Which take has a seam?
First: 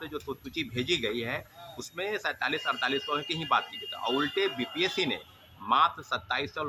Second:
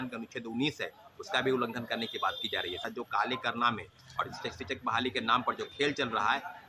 second; 1 cut; at 2.9 s

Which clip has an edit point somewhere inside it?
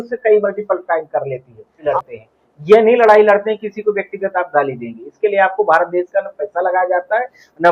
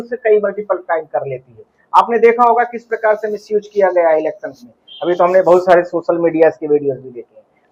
first; 1 cut; at 1.8 s

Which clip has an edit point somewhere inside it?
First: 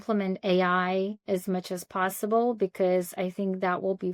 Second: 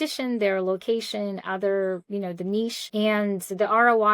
second; 1 cut; at 2.9 s

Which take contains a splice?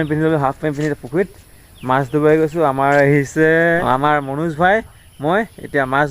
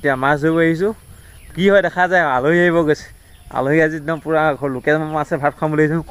first; 1 cut; at 3.8 s

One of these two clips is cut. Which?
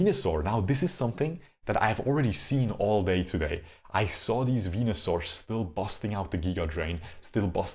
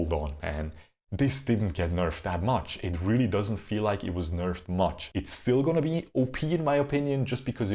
second; 1 cut; at 5.0 s

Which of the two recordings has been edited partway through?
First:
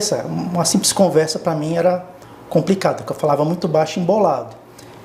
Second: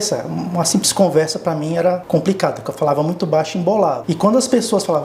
second; 2 cuts; at 2.0 s, 4.0 s

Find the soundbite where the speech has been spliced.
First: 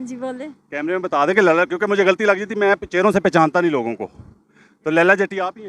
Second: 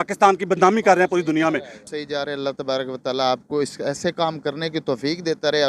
second; 1 cut; at 1.8 s

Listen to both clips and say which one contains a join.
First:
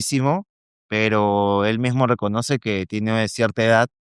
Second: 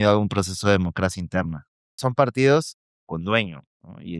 second; 1 cut; at 2.0 s

